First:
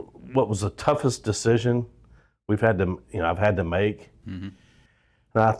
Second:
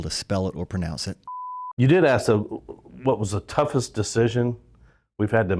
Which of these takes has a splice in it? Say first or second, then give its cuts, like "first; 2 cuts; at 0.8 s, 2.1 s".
second; 1 cut; at 1.5 s